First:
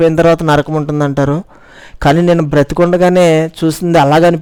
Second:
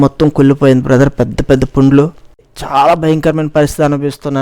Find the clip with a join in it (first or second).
second